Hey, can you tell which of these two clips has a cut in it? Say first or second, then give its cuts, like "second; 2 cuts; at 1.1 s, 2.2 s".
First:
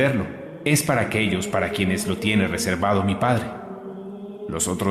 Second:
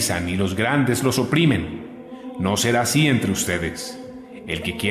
second; 1 cut; at 3.8 s